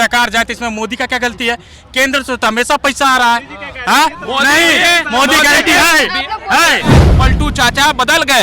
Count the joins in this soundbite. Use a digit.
1